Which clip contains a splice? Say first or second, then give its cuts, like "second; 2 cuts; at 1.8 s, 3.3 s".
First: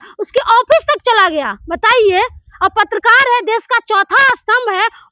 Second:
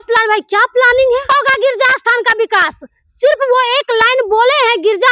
second; 1 cut; at 1.3 s